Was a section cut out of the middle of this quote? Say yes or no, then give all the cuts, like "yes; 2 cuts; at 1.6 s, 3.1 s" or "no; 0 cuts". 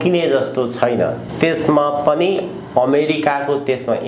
yes; 1 cut; at 1.2 s